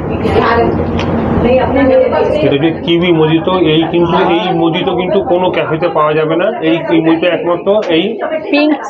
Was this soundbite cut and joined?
no; 0 cuts

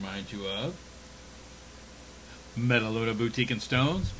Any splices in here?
no; 0 cuts

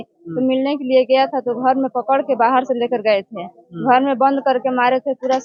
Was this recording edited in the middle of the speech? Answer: no; 0 cuts

